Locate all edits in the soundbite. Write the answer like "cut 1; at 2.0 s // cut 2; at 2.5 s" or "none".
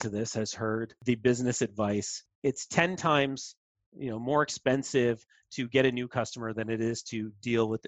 cut 1; at 1.0 s // cut 2; at 2.2 s

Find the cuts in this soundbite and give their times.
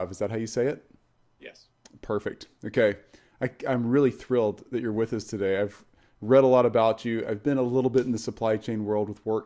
cut 1; at 2.6 s

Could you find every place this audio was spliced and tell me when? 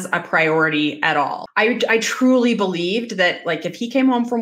cut 1; at 1.4 s

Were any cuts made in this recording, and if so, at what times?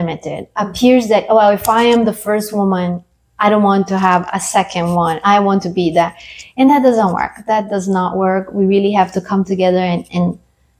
none

